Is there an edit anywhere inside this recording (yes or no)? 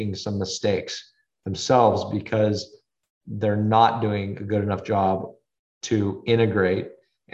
no